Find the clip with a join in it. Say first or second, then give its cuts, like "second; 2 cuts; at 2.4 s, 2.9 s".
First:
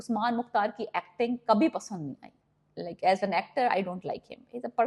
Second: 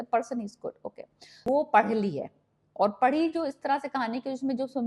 second; 1 cut; at 1.4 s